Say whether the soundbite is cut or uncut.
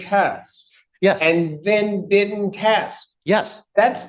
uncut